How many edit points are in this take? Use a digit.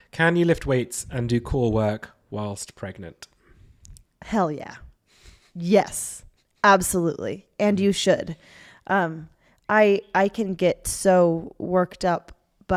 0